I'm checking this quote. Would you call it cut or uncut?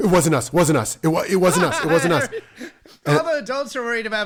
uncut